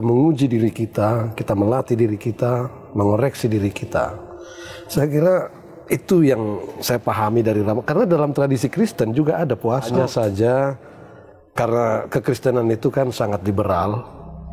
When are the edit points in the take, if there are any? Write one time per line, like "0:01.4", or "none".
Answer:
none